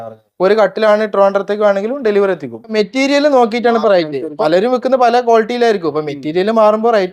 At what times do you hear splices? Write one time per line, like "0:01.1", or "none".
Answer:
0:02.7
0:04.2